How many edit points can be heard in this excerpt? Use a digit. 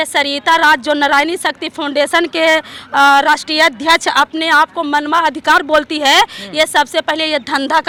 0